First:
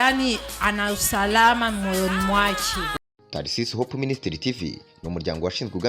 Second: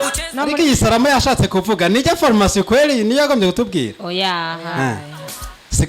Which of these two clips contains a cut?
first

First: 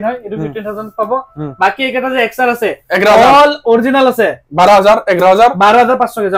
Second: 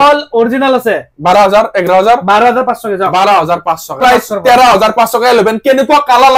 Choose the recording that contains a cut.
second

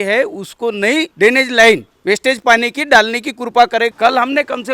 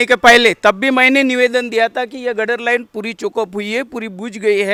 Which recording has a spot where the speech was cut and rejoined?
first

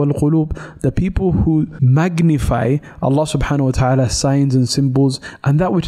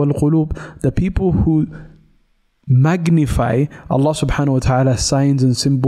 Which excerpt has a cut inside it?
first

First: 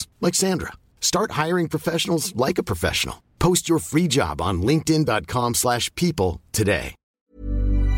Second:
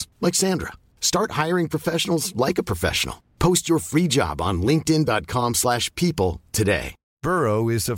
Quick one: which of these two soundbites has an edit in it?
first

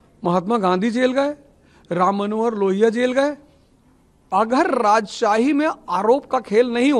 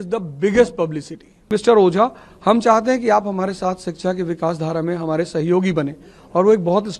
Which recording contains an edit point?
second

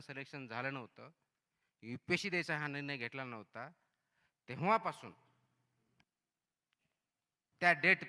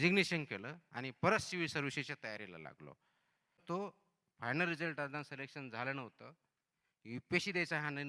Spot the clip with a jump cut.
second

